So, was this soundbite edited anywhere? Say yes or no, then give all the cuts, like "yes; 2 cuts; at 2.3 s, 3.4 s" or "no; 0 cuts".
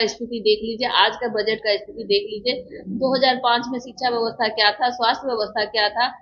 no; 0 cuts